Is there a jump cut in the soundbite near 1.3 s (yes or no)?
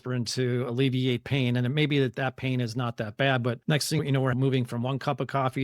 no